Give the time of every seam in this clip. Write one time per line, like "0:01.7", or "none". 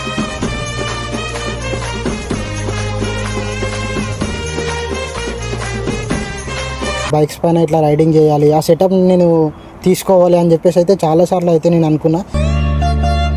0:07.1